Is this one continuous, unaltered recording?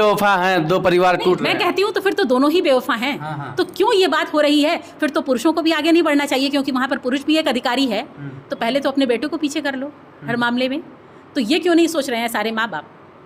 yes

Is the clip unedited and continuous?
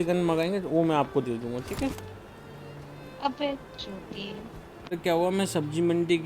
no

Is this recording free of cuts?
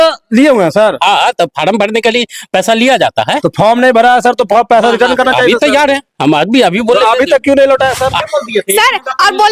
no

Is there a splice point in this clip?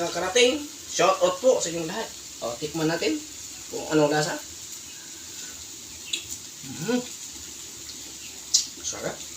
no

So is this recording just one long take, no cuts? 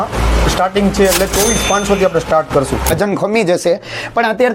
no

